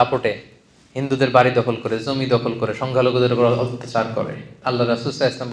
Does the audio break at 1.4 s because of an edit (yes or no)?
no